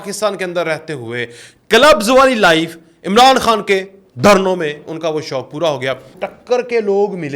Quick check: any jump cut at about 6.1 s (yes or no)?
yes